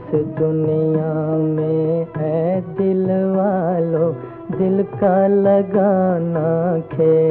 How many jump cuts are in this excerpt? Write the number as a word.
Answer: zero